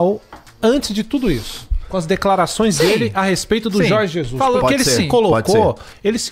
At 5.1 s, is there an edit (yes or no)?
no